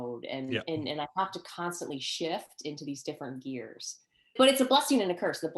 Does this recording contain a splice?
yes; 1 cut; at 4.3 s

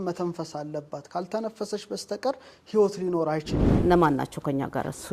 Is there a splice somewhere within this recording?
yes; 1 cut; at 3.6 s

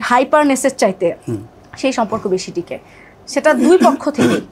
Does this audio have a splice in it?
no; 0 cuts

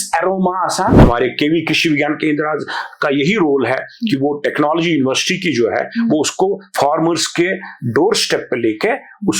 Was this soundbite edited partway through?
yes; 1 cut; at 1.0 s

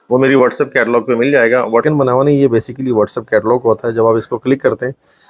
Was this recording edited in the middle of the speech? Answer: yes; 1 cut; at 1.8 s

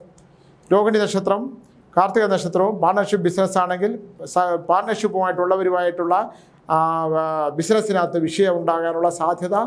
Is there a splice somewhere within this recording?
no; 0 cuts

